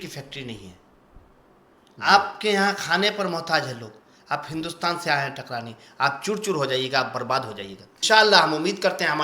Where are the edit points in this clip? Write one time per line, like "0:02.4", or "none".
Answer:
0:07.9

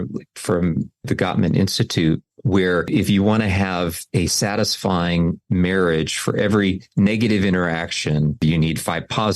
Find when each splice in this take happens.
0:01.0

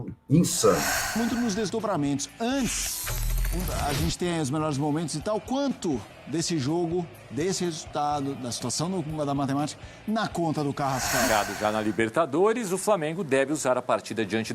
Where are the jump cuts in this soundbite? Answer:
0:01.0
0:11.3

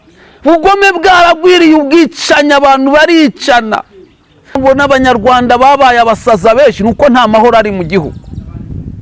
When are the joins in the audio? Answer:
0:04.6

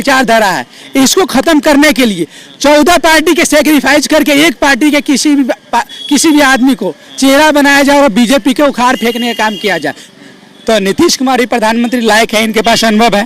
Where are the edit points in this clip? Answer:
0:10.1

